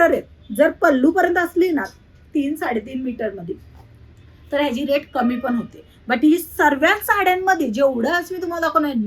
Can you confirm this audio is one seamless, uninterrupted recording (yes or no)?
yes